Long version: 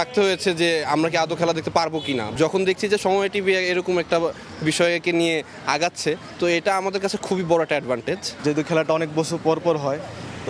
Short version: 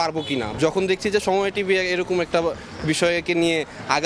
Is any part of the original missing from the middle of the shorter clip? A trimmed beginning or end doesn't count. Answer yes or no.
no